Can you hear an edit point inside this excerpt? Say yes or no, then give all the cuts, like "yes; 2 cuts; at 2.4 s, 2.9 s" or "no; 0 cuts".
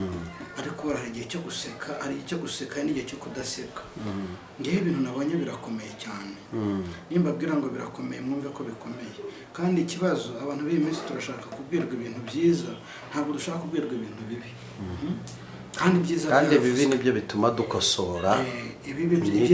no; 0 cuts